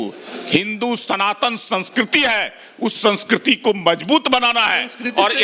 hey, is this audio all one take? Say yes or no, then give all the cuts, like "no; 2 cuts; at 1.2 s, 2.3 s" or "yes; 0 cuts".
yes; 0 cuts